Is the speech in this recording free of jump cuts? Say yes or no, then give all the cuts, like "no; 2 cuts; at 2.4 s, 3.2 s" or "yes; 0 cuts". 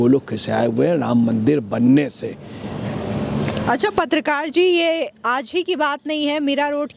yes; 0 cuts